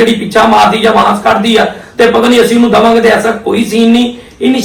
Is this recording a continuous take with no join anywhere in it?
yes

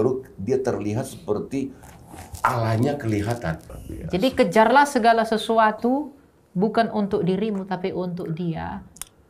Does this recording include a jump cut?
yes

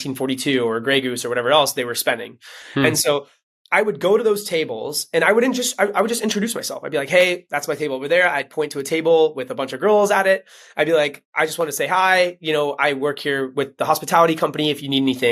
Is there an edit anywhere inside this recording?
no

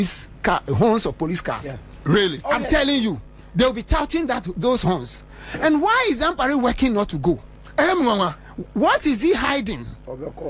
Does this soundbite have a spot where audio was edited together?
no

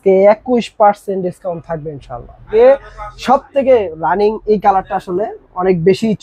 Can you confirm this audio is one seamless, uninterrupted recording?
no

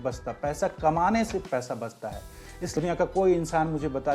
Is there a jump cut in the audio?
yes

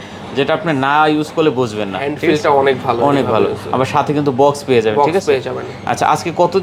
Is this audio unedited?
yes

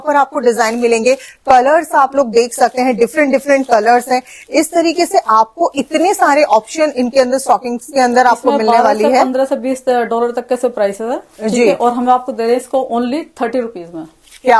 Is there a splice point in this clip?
no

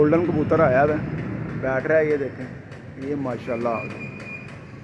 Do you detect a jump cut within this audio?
no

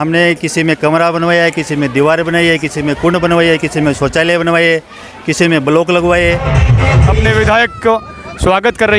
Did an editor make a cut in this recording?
yes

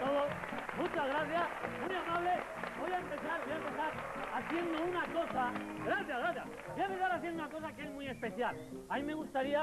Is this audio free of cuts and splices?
yes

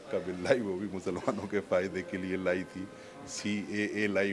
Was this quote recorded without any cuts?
yes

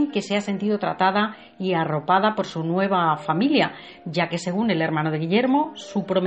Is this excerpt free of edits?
no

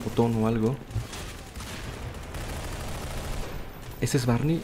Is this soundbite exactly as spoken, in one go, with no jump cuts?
yes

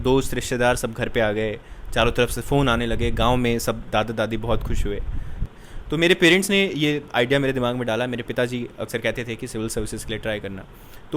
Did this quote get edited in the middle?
yes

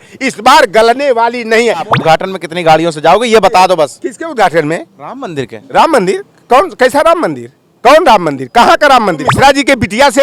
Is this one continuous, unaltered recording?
no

